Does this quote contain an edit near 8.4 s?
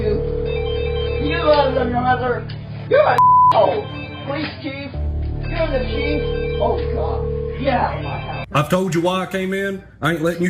yes; 1 cut; at 8.4 s

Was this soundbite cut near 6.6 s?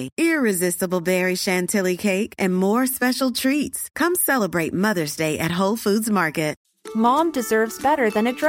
yes; 1 cut; at 6.6 s

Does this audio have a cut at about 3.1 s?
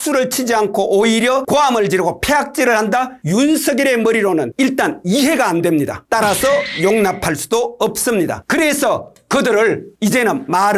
no; 0 cuts

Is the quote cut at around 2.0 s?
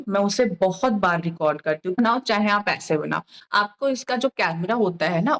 yes; 1 cut; at 2.0 s

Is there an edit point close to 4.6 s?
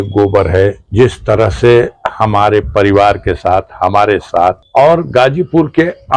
yes; 2 cuts; at 0.8 s, 4.6 s

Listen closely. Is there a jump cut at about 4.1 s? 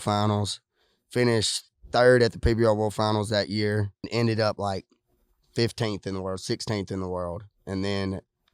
yes; 1 cut; at 4.1 s

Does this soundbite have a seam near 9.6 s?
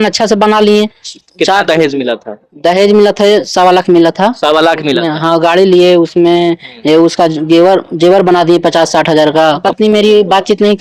yes; 2 cuts; at 1.0 s, 9.6 s

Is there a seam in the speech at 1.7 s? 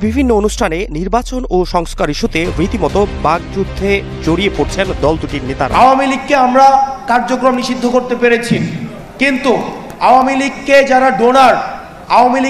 no; 1 cut; at 5.7 s

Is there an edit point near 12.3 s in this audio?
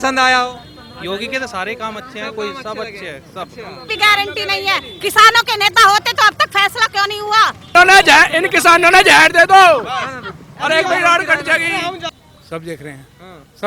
yes; 3 cuts; at 3.9 s, 7.8 s, 12.3 s

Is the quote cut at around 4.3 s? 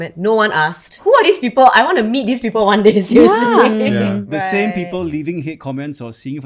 yes; 2 cuts; at 0.9 s, 4.3 s

